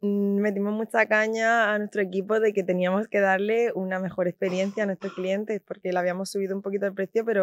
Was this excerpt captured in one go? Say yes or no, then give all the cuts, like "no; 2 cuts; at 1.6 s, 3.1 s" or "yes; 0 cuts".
yes; 0 cuts